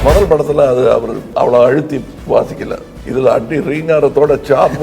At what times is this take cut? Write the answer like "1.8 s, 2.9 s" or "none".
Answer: 1.2 s, 2.1 s, 3.0 s